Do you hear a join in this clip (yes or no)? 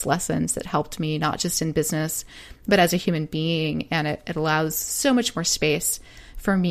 no